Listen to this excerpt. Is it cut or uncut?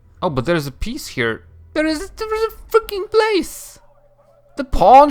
cut